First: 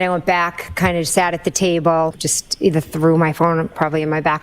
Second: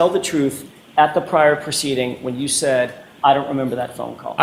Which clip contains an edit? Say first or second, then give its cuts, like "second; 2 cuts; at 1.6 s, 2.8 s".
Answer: first; 1 cut; at 2.2 s